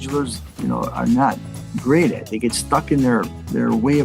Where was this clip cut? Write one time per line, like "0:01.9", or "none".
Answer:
none

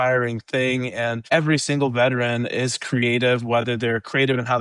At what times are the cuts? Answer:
0:01.2

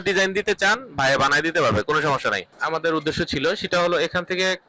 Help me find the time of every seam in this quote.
0:02.5

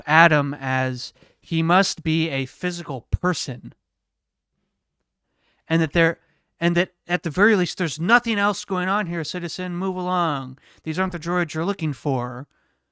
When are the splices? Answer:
none

